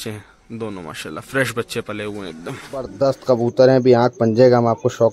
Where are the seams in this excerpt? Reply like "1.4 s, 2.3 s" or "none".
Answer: 2.9 s